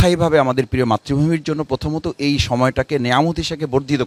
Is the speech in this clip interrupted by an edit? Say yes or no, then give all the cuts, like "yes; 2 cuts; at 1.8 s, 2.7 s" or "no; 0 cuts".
no; 0 cuts